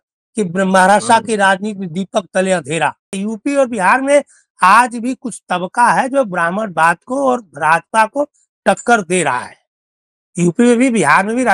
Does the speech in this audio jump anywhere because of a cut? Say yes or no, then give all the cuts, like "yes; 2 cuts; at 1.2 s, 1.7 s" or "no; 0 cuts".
yes; 1 cut; at 3.2 s